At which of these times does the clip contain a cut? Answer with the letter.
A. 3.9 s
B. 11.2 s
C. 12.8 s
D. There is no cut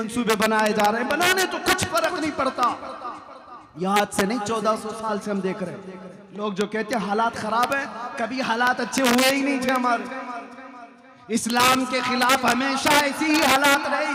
D